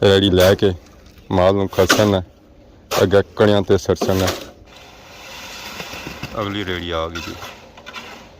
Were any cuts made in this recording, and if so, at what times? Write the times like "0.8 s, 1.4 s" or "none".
4.5 s